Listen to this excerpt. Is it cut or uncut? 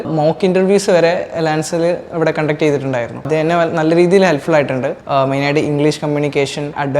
cut